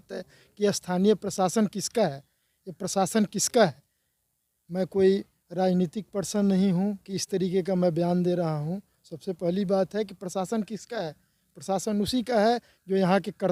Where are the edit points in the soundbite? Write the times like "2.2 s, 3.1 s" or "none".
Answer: none